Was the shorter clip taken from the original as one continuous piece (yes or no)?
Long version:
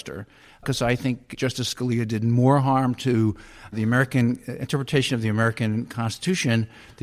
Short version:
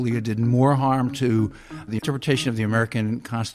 no